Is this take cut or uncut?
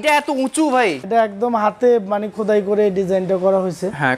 cut